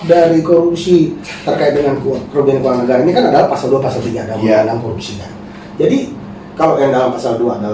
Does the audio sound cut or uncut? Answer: cut